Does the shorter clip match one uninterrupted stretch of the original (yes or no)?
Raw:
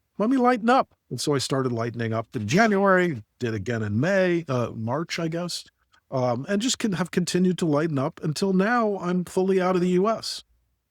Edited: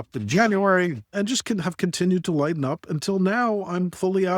no